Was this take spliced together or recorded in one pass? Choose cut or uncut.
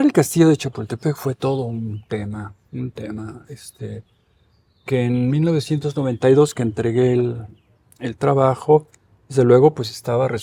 uncut